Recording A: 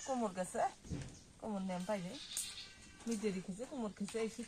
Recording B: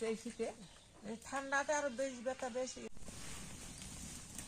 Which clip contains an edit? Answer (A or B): B